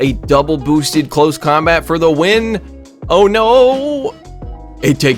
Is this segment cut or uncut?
uncut